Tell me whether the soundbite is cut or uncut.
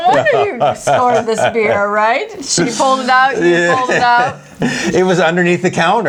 uncut